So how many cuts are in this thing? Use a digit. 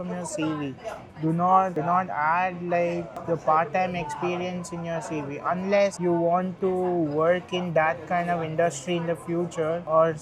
0